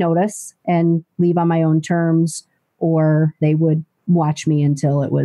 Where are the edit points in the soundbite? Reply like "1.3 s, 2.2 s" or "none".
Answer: 3.4 s

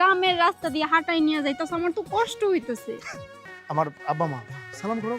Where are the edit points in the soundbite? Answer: 3.1 s

